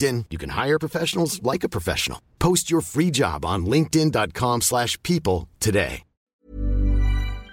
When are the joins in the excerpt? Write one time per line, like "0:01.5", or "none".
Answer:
0:06.2